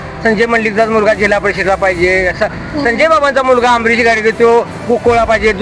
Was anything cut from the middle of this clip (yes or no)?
no